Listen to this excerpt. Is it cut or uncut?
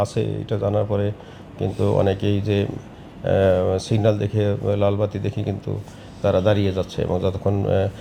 uncut